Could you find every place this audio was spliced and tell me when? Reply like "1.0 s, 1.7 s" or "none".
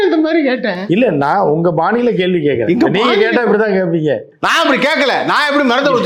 none